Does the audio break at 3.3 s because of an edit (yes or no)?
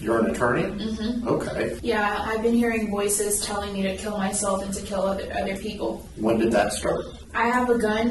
no